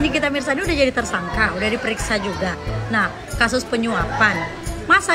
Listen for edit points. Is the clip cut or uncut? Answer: uncut